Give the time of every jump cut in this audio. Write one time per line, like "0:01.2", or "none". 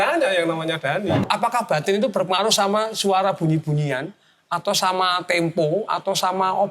0:01.2